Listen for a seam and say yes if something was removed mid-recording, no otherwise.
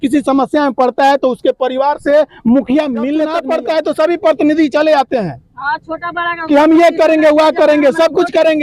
yes